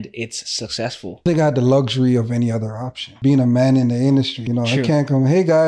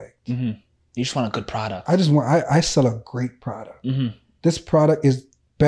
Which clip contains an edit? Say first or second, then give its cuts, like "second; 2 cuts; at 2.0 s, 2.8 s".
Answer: first; 3 cuts; at 1.2 s, 3.1 s, 4.4 s